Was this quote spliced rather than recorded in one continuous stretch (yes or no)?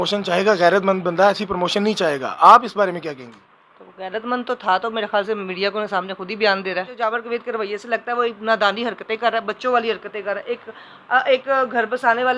yes